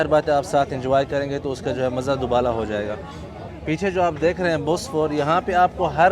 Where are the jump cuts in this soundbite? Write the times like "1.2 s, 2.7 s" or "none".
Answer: none